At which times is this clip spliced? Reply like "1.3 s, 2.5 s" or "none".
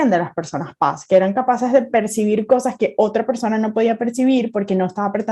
none